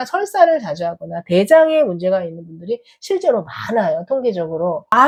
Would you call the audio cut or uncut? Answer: uncut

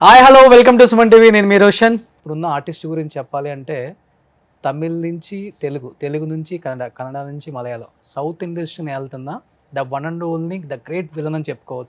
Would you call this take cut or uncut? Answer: cut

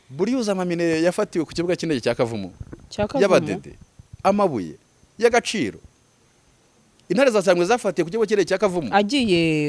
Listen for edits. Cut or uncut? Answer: uncut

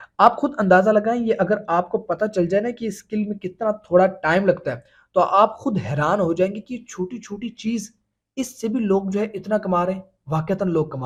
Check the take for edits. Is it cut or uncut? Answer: uncut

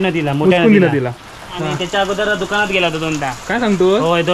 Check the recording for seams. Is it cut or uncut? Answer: cut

